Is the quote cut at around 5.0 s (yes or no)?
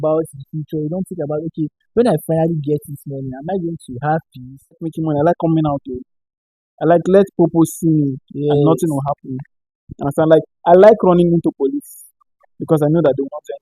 yes